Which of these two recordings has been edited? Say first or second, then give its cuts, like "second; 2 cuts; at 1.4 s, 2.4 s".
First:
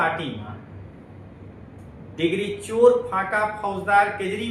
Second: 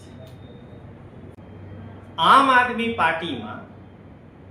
second; 1 cut; at 1.4 s